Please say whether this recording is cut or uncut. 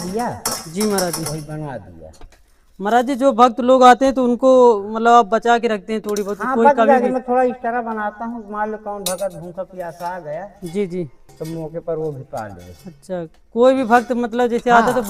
uncut